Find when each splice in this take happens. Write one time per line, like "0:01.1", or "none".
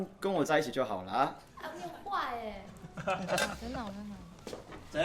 0:02.8